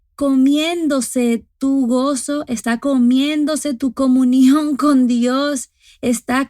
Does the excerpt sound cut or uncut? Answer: cut